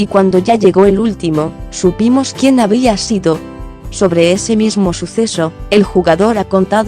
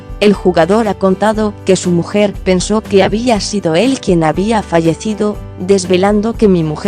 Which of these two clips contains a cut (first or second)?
first